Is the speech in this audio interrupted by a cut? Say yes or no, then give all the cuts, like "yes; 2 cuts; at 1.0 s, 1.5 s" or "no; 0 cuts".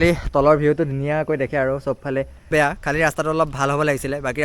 yes; 1 cut; at 2.5 s